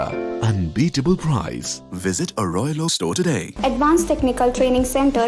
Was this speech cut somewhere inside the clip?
yes; 1 cut; at 3.5 s

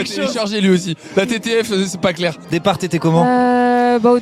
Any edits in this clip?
yes; 1 cut; at 2.4 s

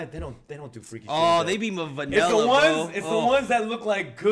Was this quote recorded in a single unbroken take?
yes; 0 cuts

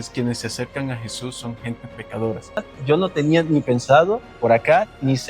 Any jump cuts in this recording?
yes; 1 cut; at 2.7 s

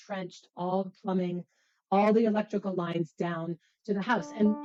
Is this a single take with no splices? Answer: yes; 0 cuts

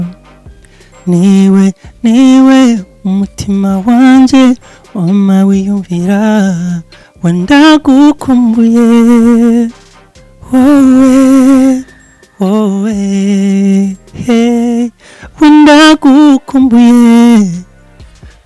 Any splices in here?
no; 0 cuts

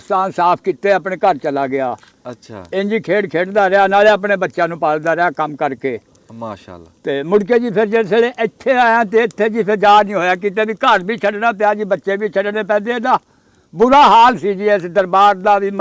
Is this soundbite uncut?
yes; 0 cuts

